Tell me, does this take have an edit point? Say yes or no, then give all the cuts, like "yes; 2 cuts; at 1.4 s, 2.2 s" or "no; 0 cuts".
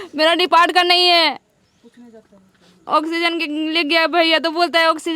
no; 0 cuts